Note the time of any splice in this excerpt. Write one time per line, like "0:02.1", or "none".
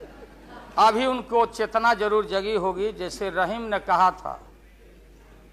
none